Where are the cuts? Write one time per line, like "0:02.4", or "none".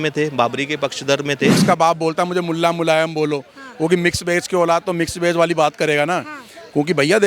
0:01.6

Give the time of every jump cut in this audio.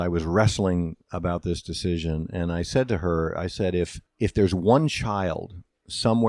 0:04.0

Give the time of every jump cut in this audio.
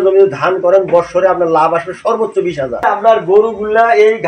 0:03.2

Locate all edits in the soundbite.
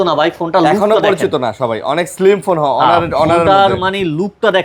none

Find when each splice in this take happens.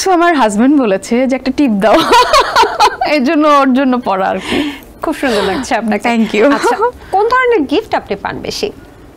none

